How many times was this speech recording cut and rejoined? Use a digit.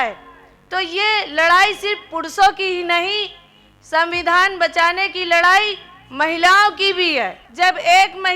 1